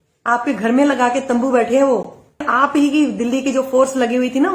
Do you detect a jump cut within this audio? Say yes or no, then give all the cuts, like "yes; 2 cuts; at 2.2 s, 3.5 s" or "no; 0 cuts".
yes; 1 cut; at 2.5 s